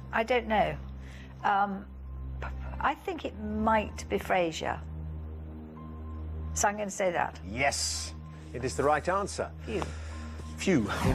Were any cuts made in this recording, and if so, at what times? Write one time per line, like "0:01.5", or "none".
none